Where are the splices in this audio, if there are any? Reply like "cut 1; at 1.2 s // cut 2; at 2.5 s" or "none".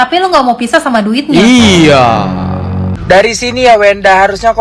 cut 1; at 2.9 s